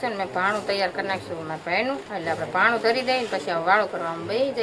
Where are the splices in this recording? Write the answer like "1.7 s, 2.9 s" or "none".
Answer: none